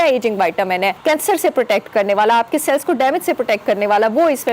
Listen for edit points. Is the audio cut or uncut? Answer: cut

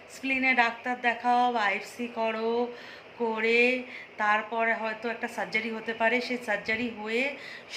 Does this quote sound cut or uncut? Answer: uncut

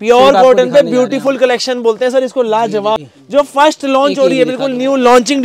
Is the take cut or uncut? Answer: cut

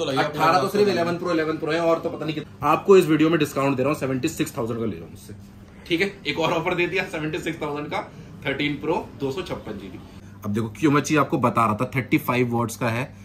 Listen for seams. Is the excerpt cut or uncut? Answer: cut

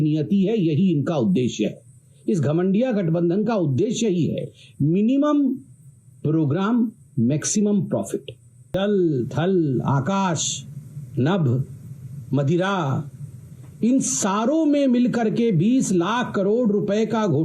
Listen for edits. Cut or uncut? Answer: cut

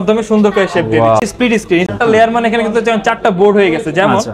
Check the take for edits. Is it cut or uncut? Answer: cut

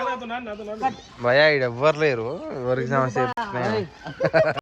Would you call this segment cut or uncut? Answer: uncut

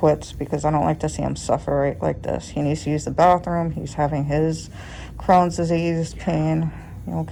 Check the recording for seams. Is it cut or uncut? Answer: uncut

